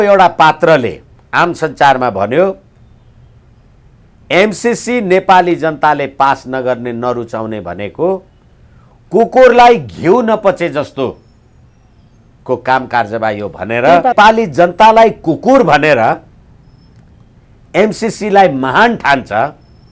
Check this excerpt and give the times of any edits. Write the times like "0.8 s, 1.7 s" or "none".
14.1 s